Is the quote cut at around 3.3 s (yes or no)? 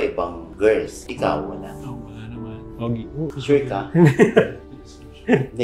yes